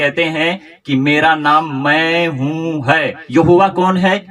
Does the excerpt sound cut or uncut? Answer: cut